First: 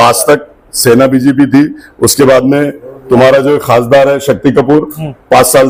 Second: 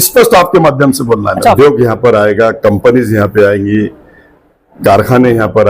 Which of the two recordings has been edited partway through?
second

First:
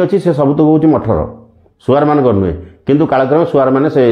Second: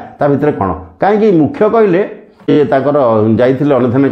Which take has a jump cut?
second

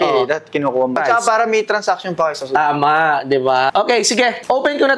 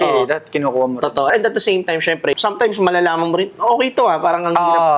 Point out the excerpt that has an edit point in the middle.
first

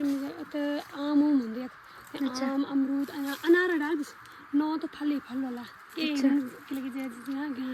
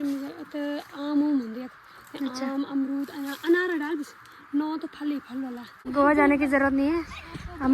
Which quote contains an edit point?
second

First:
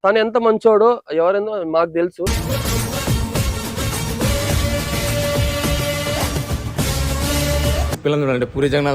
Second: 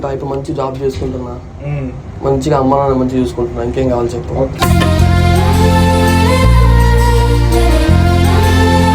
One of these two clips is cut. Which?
first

